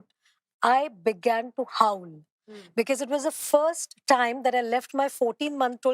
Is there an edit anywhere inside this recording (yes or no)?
no